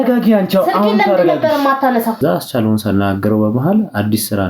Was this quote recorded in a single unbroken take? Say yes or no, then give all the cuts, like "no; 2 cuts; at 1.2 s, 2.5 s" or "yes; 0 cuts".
no; 1 cut; at 2.2 s